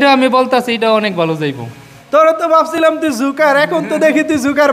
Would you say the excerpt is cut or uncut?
cut